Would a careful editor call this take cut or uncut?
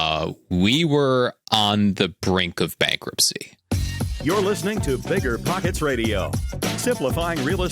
cut